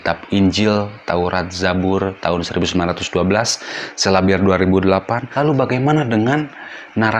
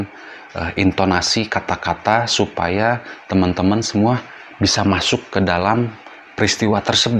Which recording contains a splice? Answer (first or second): first